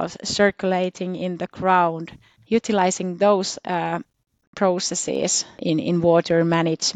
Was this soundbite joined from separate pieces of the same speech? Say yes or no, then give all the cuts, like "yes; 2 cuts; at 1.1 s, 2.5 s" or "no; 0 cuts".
yes; 1 cut; at 5.6 s